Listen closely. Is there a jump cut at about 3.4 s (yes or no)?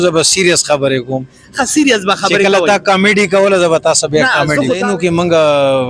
no